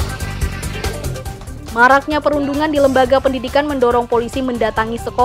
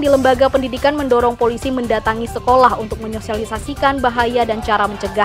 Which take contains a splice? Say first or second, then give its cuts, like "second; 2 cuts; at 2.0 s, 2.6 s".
first; 1 cut; at 1.3 s